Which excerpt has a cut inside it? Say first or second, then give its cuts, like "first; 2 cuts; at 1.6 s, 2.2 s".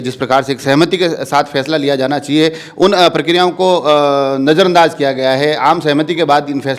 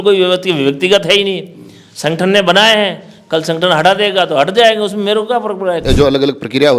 second; 1 cut; at 5.8 s